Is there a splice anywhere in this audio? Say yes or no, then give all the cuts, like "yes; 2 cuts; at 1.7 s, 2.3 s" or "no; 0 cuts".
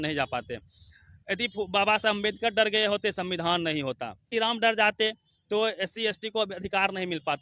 yes; 1 cut; at 4.3 s